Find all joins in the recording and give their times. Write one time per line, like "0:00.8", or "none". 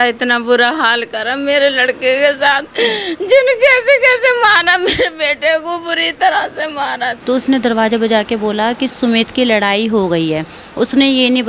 0:07.1